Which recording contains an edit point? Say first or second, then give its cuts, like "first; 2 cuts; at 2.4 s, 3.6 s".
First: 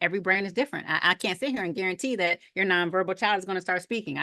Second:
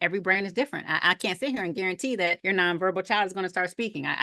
second; 1 cut; at 2.4 s